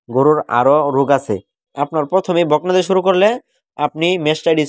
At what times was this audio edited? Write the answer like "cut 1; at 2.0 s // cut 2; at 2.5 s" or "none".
cut 1; at 1.6 s